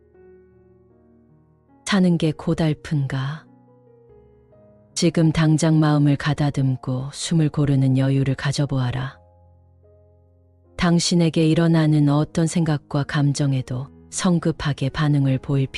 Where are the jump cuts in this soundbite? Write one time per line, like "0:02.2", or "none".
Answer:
none

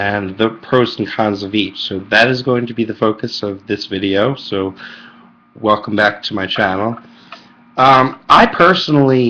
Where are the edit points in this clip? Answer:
none

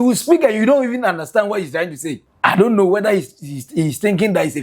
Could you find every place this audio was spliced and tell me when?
0:02.3

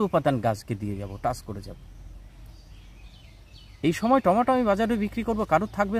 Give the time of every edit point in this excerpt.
none

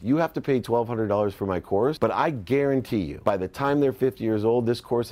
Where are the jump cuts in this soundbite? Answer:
0:02.0
0:03.1

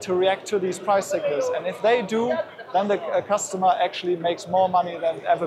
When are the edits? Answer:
none

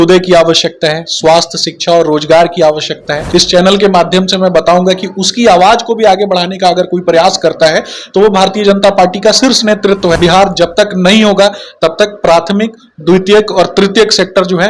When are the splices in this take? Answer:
0:03.1
0:10.2

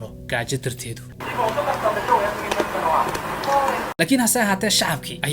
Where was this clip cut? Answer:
0:01.1
0:03.9

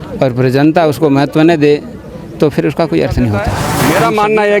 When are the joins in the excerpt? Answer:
0:03.7

